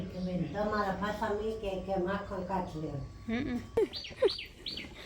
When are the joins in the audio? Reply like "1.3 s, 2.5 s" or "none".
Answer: 4.0 s

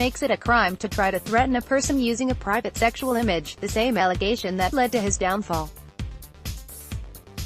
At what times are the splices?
6.2 s

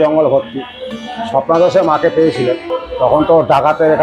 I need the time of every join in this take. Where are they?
2.8 s

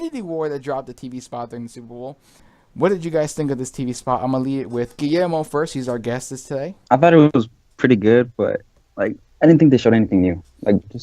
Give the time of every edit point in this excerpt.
2.4 s, 6.7 s

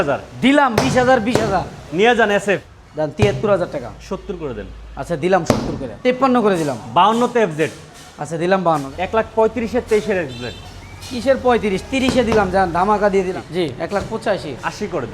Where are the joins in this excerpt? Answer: 2.7 s, 5.9 s, 8.9 s, 13.3 s

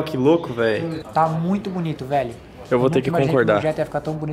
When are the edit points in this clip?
1.0 s

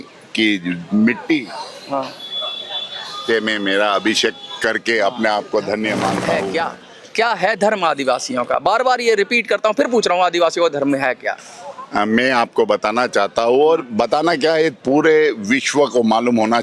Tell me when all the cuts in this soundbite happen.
6.3 s

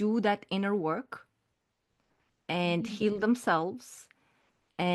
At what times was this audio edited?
none

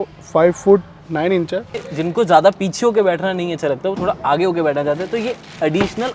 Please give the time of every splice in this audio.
1.8 s

